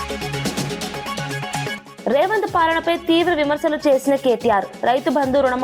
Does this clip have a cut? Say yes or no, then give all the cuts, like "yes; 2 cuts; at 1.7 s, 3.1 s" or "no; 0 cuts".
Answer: yes; 1 cut; at 1.9 s